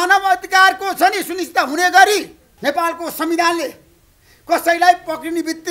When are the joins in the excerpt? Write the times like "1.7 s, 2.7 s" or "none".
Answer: 2.4 s

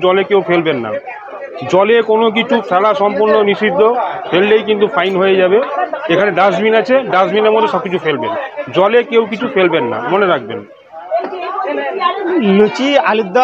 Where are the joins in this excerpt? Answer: none

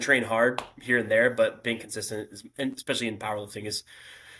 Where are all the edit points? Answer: none

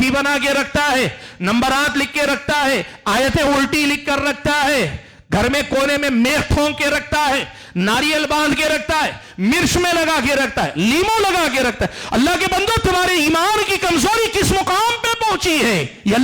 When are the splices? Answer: none

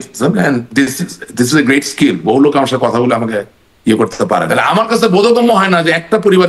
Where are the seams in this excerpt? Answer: 4.5 s

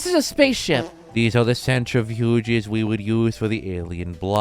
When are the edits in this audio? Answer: 1.0 s

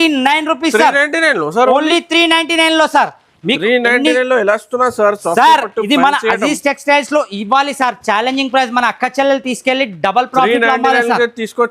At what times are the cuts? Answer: none

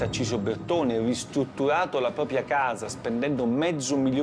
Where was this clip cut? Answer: none

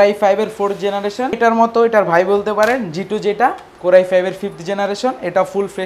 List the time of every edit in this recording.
1.4 s

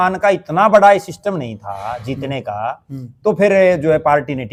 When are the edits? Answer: none

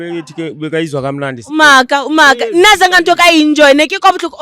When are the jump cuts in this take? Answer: 1.4 s

